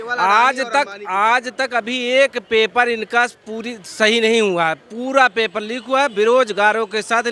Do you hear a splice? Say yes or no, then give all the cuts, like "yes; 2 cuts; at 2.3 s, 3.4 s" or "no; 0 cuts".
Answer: no; 0 cuts